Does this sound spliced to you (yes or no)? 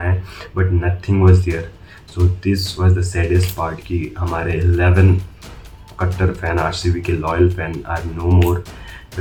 no